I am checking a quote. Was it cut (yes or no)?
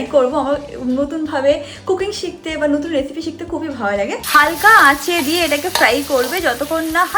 yes